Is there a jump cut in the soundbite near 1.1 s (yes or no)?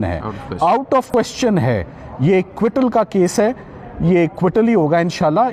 yes